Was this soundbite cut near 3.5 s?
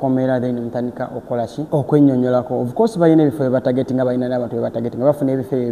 no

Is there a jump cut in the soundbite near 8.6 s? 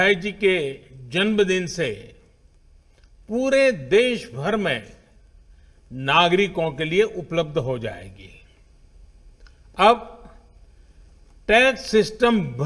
yes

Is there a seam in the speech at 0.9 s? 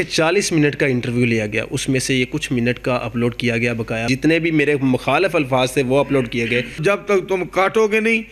no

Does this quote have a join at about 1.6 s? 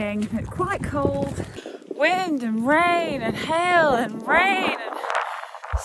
yes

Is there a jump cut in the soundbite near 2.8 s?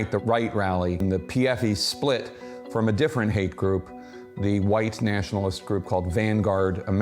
no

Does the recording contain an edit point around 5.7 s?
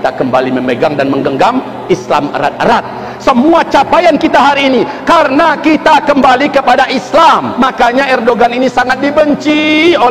no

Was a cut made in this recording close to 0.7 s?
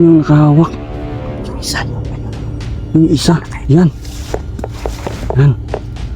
yes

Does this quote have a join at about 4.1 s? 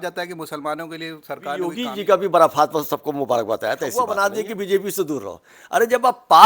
yes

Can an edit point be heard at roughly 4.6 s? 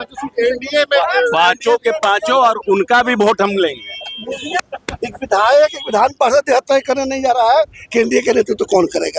yes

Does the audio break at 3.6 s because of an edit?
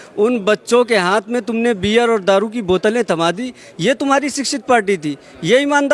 no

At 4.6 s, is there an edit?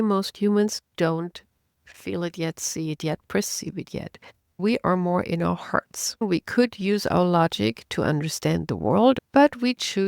yes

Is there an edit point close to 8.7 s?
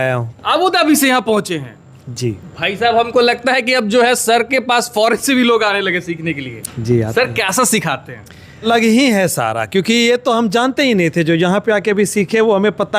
yes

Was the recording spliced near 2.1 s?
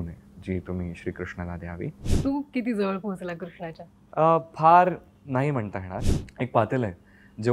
yes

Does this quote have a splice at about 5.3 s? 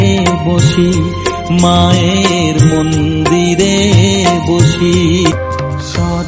yes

